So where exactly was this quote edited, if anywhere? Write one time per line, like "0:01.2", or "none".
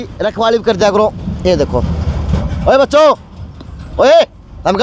none